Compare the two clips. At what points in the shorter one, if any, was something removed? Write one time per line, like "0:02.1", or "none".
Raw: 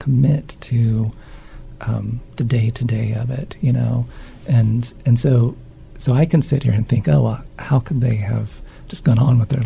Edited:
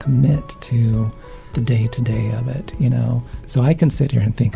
0:01.4
0:03.3